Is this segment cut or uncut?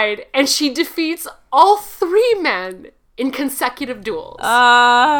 uncut